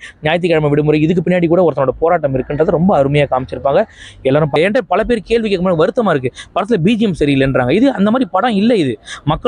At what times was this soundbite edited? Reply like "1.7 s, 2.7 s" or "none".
4.6 s